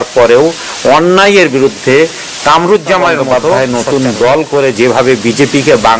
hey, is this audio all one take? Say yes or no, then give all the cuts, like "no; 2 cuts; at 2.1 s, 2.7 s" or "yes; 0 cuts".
no; 1 cut; at 3.3 s